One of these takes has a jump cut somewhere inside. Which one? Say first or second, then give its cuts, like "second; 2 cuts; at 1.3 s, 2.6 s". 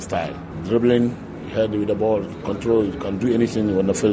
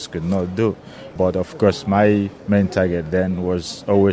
second; 2 cuts; at 1.1 s, 2.4 s